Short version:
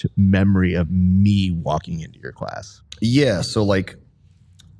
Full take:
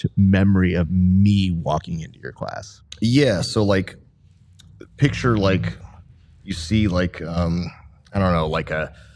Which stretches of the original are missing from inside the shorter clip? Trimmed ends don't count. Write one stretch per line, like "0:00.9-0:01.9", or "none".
none